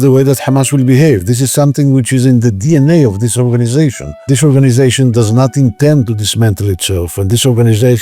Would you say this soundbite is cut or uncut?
cut